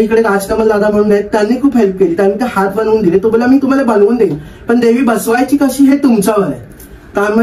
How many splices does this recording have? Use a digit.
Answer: 0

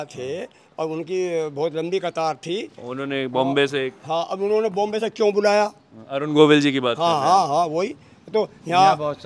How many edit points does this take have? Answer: 0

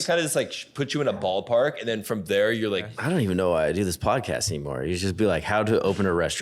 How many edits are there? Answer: 1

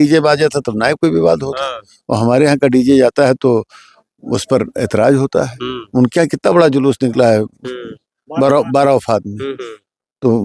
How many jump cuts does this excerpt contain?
0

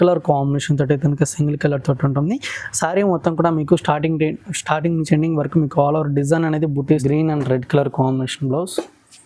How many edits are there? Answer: 1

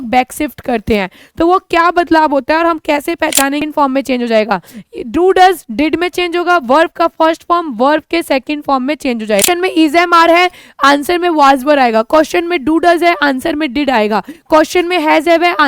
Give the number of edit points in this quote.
2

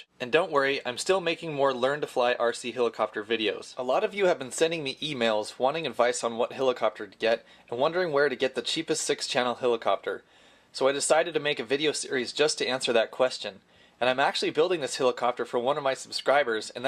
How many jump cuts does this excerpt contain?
1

